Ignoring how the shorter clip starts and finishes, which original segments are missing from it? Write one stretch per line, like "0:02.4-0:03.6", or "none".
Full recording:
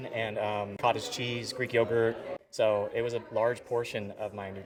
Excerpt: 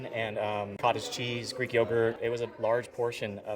0:02.2-0:02.9